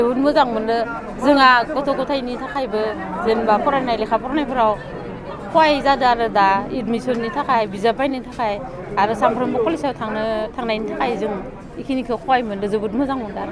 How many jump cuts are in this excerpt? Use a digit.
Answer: 0